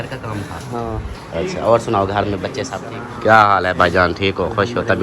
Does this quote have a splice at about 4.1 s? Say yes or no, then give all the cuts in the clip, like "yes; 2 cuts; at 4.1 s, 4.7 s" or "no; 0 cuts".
no; 1 cut; at 2.7 s